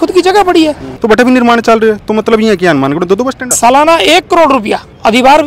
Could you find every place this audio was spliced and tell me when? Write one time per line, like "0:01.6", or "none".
0:00.9
0:03.5